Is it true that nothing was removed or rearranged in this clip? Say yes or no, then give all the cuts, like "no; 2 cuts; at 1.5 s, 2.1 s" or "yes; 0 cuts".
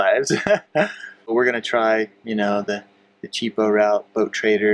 no; 1 cut; at 1.3 s